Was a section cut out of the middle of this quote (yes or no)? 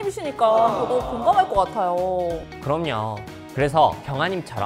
no